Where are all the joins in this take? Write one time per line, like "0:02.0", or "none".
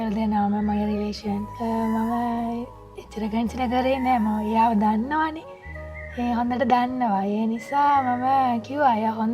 0:01.5